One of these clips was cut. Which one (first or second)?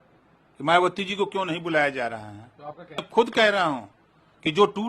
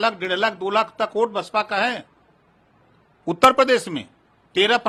first